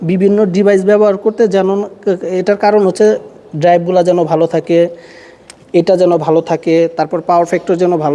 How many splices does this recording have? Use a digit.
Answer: 0